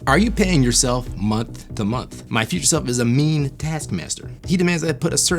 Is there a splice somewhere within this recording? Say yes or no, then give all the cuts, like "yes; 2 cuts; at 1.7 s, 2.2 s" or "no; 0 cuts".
yes; 1 cut; at 2.1 s